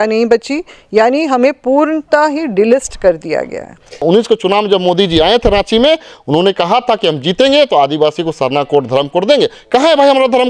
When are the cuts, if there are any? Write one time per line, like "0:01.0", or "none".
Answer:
0:04.0